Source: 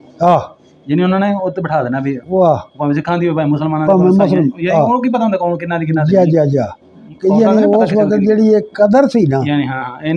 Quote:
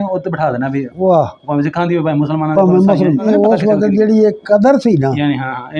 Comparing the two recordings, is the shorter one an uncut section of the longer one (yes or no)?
no